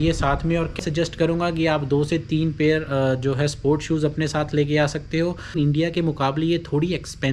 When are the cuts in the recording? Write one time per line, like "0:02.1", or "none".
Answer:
0:00.8
0:05.6